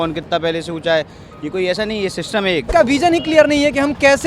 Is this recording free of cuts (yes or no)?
no